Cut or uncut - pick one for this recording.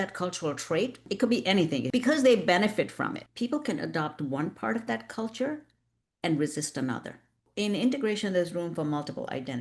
cut